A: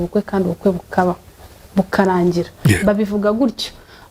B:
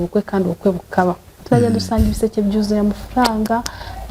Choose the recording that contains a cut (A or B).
B